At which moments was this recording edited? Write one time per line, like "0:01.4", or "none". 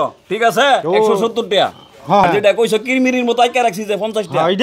0:02.2

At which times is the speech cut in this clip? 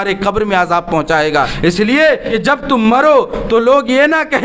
0:01.5
0:02.3

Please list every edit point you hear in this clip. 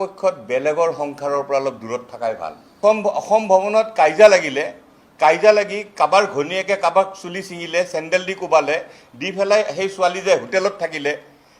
0:02.8

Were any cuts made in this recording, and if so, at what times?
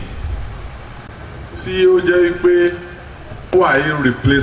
0:01.1
0:03.5

